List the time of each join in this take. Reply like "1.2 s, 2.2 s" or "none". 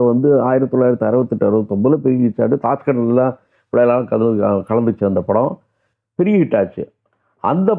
none